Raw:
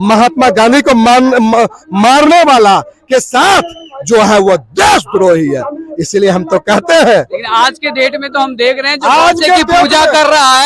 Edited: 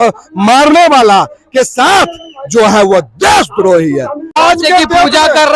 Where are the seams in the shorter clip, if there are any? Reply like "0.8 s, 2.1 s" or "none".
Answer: 4.4 s